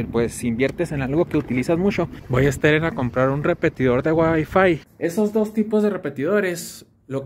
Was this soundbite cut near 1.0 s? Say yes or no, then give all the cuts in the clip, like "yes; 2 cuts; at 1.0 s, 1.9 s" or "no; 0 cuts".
no; 2 cuts; at 2.2 s, 4.9 s